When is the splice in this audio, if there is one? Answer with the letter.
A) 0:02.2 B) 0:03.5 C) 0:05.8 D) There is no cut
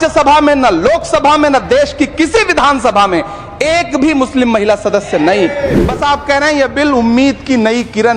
C